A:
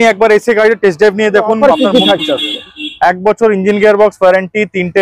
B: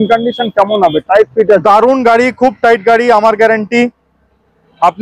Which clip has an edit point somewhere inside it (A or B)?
A